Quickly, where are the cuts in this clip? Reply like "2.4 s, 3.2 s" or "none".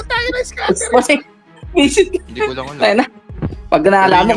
none